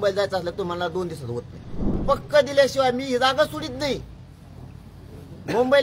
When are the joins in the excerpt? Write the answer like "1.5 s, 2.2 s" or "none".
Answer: 2.0 s

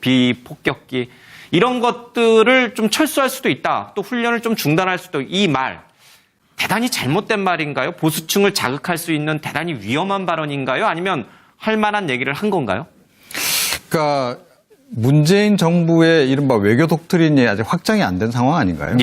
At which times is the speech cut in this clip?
5.5 s

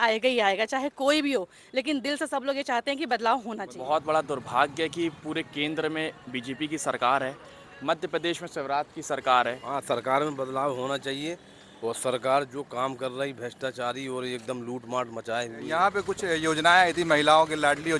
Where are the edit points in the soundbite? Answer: 3.7 s, 9.6 s, 15.7 s

